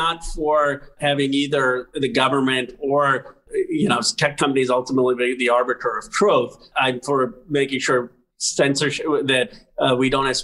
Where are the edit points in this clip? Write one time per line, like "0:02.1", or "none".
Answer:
0:01.0
0:03.5
0:06.7